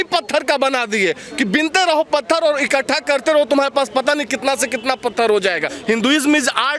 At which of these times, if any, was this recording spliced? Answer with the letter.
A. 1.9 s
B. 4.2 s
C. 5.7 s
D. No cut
C